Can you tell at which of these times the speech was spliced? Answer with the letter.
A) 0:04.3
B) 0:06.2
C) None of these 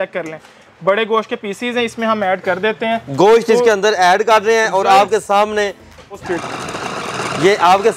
B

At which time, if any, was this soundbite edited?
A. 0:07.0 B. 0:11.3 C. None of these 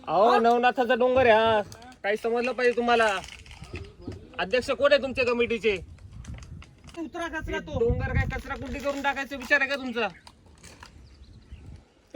A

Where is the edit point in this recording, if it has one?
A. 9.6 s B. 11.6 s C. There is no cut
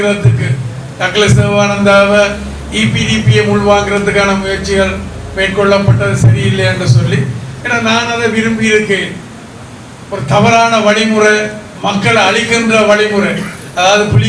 B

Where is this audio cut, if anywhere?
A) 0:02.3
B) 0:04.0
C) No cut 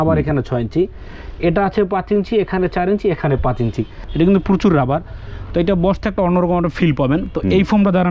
B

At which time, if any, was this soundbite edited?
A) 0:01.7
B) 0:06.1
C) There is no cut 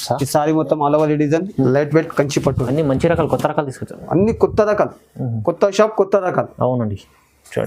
A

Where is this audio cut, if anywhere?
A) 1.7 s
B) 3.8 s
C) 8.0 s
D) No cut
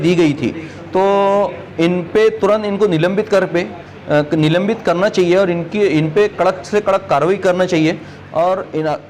D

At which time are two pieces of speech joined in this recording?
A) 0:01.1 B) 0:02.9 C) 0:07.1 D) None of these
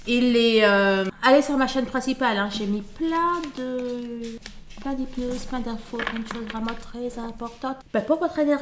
A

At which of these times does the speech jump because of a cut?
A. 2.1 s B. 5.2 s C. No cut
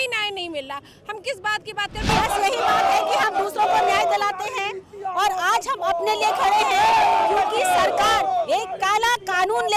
A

